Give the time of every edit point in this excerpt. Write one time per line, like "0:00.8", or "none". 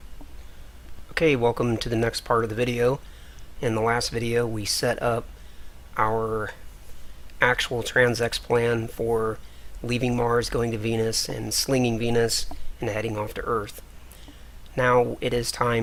none